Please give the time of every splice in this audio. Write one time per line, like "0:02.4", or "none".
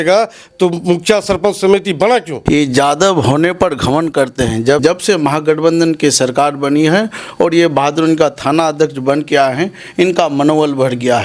0:02.3
0:04.8